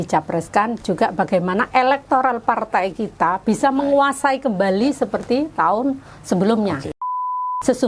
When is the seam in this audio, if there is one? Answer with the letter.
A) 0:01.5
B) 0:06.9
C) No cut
B